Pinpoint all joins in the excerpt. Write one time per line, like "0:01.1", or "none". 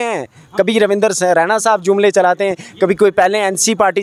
none